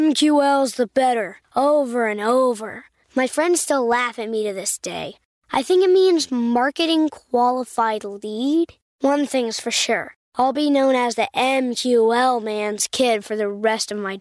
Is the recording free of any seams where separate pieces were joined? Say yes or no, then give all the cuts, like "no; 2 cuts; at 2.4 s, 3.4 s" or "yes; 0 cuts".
yes; 0 cuts